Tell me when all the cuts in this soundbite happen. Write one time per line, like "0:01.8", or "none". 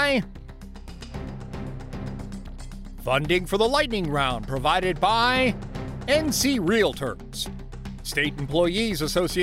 none